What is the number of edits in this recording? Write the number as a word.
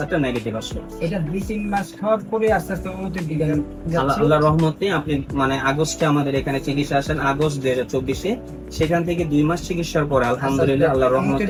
zero